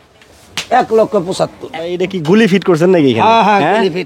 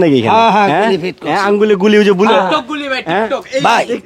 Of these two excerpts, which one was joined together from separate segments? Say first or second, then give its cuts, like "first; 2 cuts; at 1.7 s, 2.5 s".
first; 1 cut; at 1.7 s